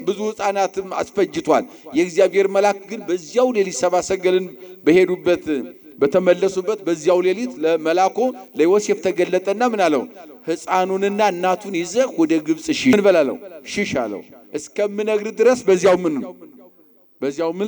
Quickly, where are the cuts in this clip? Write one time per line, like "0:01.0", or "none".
0:12.9